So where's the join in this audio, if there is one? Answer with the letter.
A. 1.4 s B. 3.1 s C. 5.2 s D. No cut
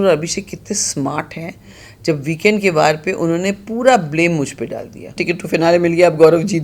C